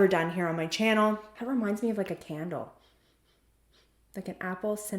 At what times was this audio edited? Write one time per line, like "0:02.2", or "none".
0:01.2